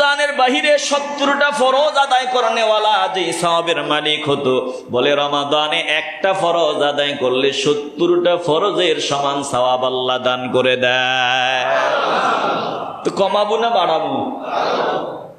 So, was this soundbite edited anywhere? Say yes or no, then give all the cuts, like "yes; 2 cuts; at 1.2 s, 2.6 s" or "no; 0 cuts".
no; 0 cuts